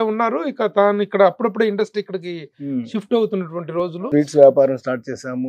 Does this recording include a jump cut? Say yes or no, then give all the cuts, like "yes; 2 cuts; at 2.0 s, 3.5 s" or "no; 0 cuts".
yes; 1 cut; at 3.9 s